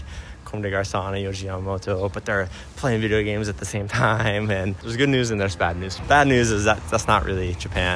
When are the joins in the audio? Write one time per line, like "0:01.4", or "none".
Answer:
0:04.8
0:05.9